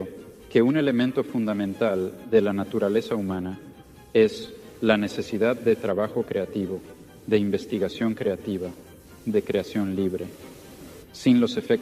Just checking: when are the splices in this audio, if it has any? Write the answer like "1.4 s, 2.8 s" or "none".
none